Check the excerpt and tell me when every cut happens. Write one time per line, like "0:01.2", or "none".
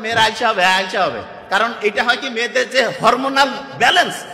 none